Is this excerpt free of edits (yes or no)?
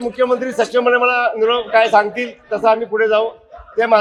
yes